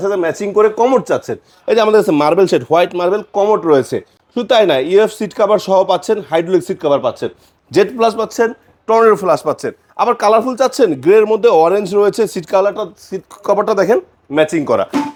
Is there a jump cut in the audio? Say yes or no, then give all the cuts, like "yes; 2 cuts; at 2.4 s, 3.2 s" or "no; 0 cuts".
no; 0 cuts